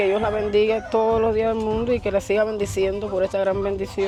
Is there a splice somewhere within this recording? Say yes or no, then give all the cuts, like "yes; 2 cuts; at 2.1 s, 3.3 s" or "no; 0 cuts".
no; 0 cuts